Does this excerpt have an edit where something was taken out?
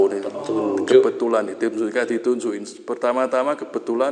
no; 0 cuts

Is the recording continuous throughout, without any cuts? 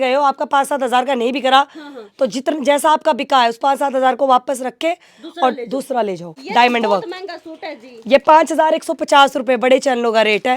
no; 1 cut; at 6.3 s

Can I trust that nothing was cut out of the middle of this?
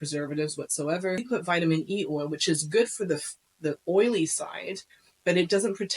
no; 1 cut; at 1.2 s

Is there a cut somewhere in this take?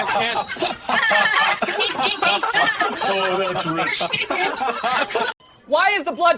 yes; 1 cut; at 5.4 s

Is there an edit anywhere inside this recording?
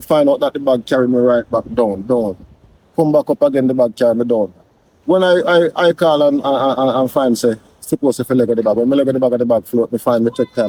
no; 0 cuts

